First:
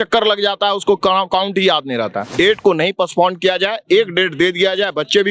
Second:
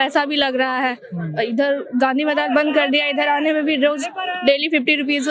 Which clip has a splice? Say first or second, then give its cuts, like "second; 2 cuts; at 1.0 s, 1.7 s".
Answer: first; 1 cut; at 2.3 s